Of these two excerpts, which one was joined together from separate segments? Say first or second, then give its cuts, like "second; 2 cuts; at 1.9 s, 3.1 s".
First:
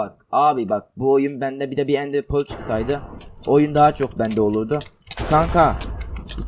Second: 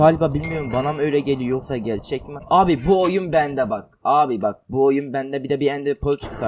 second; 1 cut; at 2.3 s